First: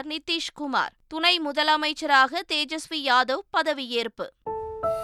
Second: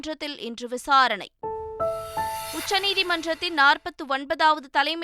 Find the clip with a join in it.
second; 1 cut; at 1.3 s

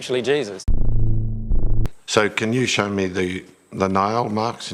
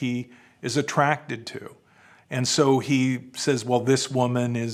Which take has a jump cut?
first; 1 cut; at 1.9 s

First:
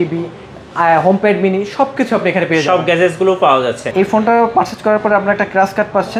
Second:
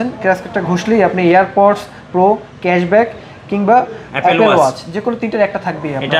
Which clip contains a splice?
first; 1 cut; at 3.8 s

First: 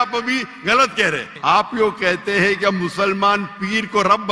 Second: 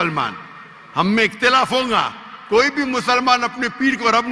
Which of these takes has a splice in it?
first; 1 cut; at 1.3 s

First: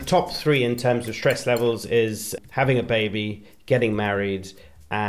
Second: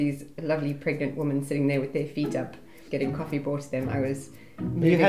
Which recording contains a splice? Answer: second; 1 cut; at 2.8 s

